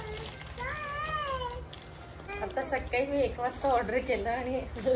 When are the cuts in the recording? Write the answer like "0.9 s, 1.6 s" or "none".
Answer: 2.2 s

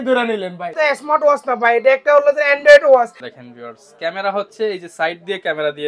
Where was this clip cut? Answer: 0.7 s, 3.2 s

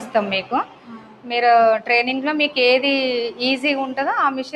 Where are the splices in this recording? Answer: none

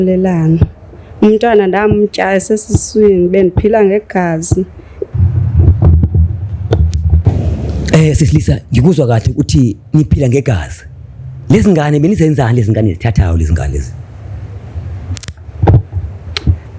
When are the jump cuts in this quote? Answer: 5.1 s

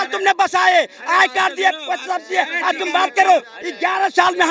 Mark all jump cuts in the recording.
none

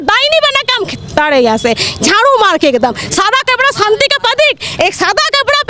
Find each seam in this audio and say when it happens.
none

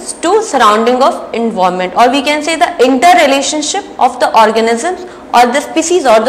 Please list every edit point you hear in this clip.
none

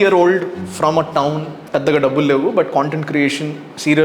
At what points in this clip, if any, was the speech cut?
1.6 s

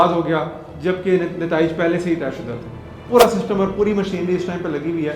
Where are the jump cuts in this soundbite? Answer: 3.0 s

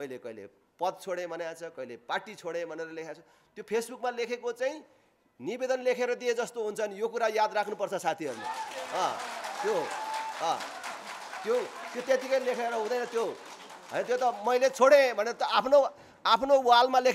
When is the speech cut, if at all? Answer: none

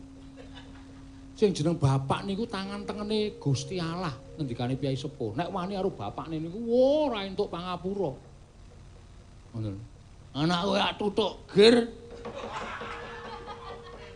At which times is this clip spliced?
none

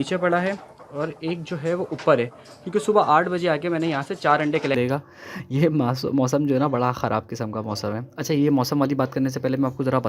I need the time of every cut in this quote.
4.8 s

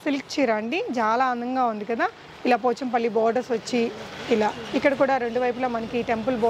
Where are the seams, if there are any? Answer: none

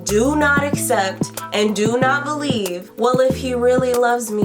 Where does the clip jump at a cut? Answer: 2.9 s

